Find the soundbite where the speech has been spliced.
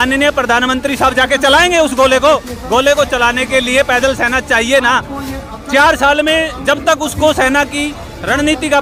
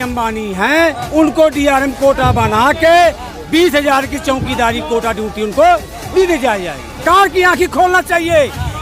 second; 2 cuts; at 1.0 s, 7.0 s

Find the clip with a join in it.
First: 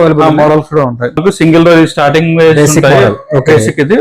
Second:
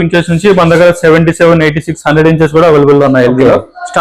first; 1 cut; at 1.2 s

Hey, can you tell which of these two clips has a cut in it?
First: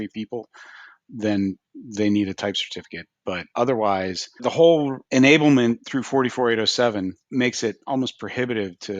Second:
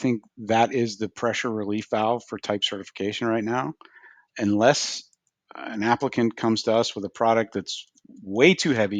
first; 5 cuts; at 3.4 s, 4.4 s, 5.0 s, 5.9 s, 7.2 s

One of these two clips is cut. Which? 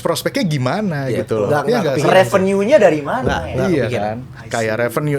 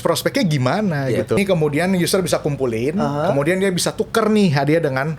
second; 1 cut; at 1.4 s

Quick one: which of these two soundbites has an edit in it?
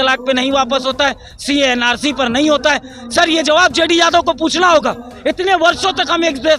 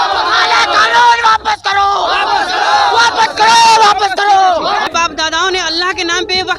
second; 1 cut; at 4.9 s

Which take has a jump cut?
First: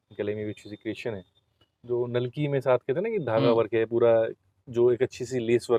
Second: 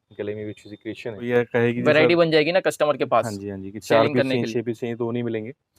second; 1 cut; at 1.2 s

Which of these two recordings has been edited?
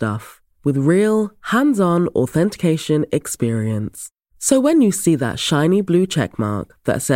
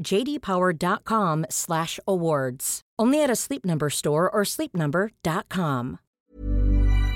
second; 1 cut; at 6.1 s

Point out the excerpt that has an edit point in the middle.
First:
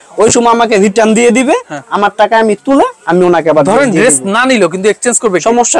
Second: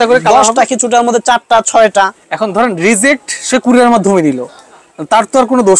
second; 1 cut; at 2.2 s

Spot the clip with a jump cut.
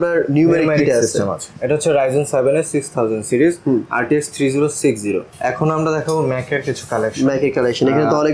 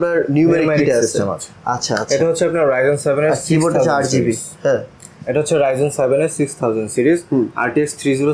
first; 2 cuts; at 1.5 s, 5.3 s

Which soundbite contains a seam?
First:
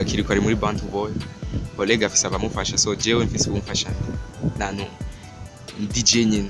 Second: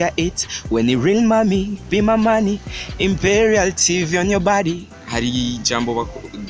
second; 1 cut; at 4.9 s

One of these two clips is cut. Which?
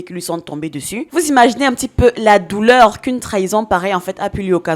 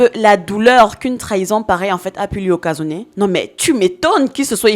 first; 1 cut; at 1.1 s

